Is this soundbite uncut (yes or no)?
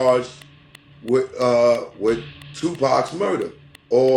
yes